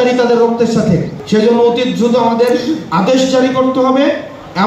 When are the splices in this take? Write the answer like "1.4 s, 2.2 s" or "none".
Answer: 1.2 s